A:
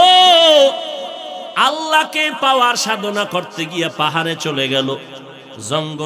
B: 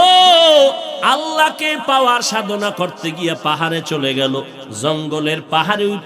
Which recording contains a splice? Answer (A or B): B